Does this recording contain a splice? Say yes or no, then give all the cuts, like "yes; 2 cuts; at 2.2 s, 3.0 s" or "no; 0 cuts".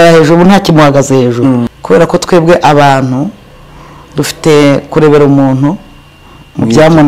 yes; 1 cut; at 1.7 s